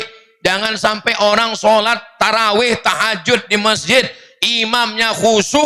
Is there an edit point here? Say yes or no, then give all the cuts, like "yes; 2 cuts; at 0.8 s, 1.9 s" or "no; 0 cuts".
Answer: no; 0 cuts